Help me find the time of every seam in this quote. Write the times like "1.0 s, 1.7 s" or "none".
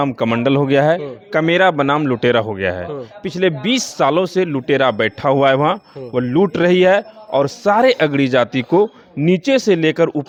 none